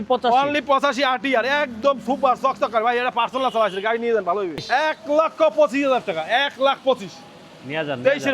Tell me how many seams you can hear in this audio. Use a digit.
1